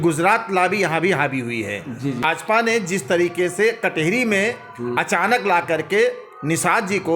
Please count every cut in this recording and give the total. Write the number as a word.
one